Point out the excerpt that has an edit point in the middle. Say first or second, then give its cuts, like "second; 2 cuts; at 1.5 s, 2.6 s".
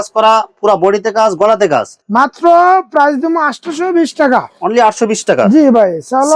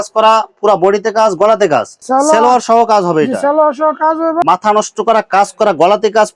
second; 2 cuts; at 2.0 s, 4.4 s